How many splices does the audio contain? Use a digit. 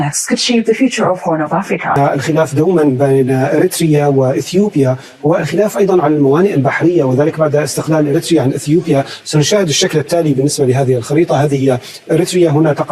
1